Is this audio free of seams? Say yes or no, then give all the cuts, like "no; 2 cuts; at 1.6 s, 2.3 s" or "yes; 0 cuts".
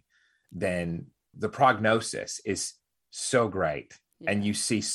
no; 1 cut; at 1.2 s